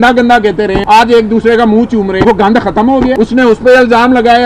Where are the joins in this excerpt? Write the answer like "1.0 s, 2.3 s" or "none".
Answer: 0.8 s, 2.2 s, 3.1 s